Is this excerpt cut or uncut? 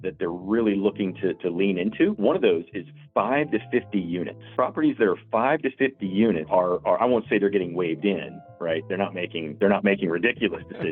cut